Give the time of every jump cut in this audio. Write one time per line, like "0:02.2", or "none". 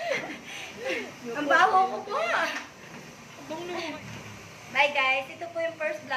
0:03.9